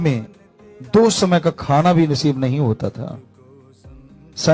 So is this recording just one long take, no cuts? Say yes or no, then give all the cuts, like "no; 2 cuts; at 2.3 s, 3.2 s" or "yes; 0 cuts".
yes; 0 cuts